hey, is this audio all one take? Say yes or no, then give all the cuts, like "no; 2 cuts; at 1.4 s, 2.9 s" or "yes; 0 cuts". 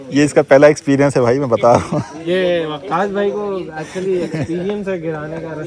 no; 1 cut; at 2.1 s